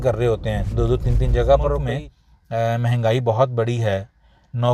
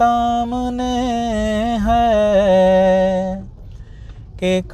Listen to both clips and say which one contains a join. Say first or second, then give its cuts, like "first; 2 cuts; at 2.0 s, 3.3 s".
first; 1 cut; at 1.9 s